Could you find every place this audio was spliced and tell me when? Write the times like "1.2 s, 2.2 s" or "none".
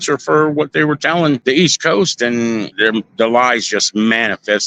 1.4 s, 2.7 s